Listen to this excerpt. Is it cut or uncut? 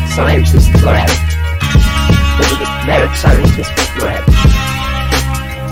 uncut